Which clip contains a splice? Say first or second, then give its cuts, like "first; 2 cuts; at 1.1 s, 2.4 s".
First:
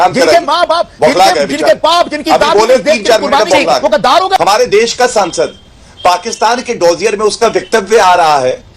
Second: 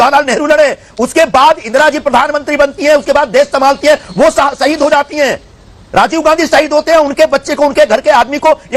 first; 1 cut; at 4.4 s